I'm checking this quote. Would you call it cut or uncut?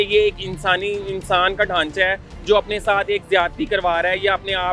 uncut